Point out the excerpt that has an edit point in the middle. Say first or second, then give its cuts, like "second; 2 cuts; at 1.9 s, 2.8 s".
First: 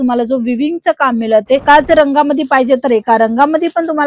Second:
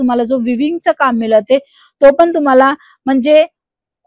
first; 1 cut; at 1.6 s